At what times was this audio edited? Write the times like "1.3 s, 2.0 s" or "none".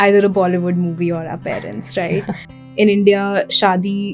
2.5 s